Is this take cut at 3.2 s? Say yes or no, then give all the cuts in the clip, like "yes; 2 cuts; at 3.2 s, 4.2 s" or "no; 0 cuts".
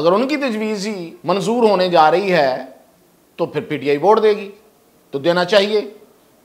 no; 1 cut; at 1.1 s